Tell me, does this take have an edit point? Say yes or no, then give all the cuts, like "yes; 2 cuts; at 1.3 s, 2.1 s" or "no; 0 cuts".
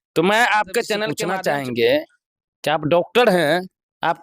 yes; 1 cut; at 1.2 s